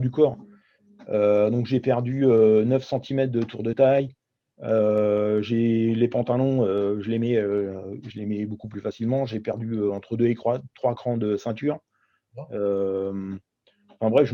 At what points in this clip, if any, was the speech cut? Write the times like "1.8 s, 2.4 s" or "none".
none